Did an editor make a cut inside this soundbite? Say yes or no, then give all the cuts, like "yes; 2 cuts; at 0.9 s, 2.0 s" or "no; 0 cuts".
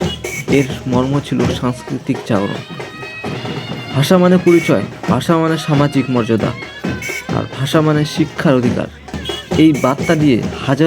no; 0 cuts